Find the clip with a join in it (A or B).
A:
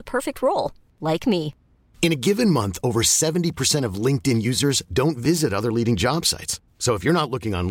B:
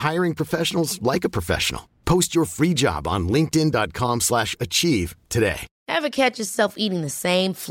B